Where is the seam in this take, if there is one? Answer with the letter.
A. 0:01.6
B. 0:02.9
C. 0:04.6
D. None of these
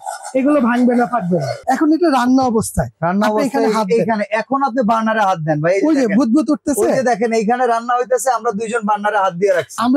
A